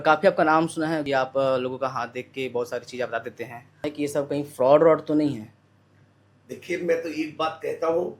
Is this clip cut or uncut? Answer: cut